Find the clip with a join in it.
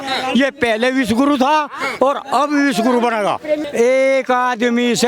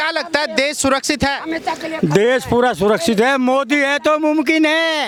first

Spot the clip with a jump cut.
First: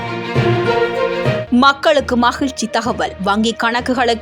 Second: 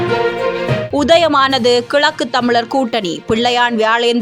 first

